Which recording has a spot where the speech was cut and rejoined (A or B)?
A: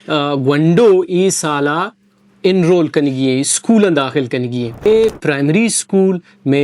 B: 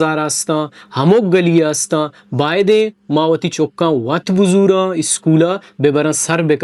A